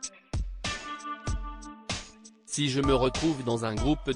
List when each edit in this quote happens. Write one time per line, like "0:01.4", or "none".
0:02.1